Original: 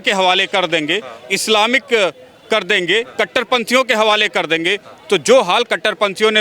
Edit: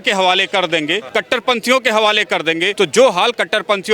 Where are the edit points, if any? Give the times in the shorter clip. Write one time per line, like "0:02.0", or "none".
0:01.1
0:02.7